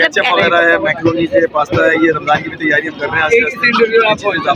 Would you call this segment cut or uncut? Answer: uncut